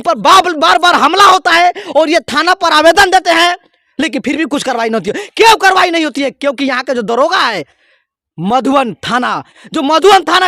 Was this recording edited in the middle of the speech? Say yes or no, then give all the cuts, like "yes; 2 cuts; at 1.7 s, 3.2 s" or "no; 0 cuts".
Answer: no; 0 cuts